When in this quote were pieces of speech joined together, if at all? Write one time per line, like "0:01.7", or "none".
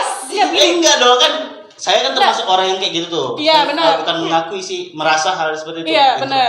none